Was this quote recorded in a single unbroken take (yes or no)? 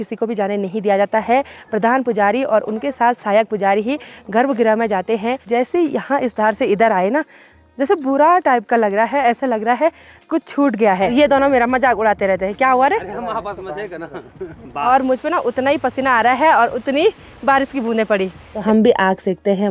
no